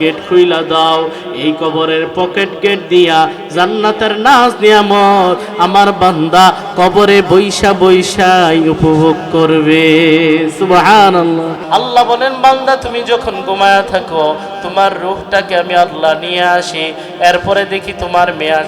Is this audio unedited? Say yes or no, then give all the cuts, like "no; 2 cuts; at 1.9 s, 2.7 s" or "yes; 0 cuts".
no; 1 cut; at 11.6 s